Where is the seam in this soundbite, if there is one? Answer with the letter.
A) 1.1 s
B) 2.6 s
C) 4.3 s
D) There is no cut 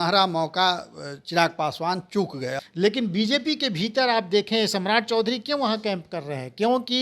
B